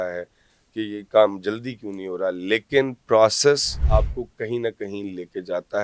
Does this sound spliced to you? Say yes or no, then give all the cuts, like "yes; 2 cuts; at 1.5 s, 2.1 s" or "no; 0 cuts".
yes; 1 cut; at 3.7 s